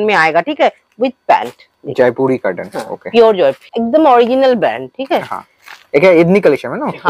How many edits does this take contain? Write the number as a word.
one